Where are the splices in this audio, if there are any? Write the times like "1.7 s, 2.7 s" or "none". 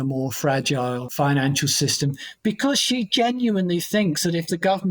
1.1 s

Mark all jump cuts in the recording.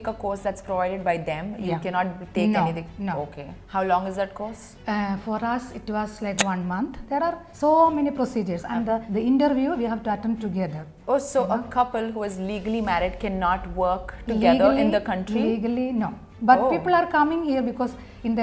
3.6 s, 7.0 s, 10.9 s

